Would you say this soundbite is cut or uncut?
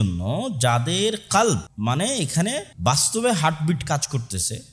cut